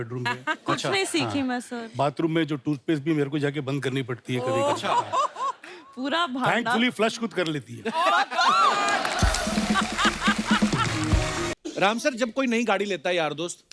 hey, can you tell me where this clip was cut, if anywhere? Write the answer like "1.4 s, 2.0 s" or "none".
11.5 s